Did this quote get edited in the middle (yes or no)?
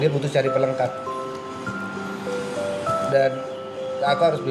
no